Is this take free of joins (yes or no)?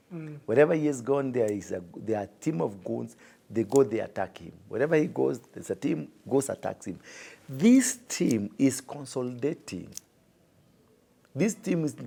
yes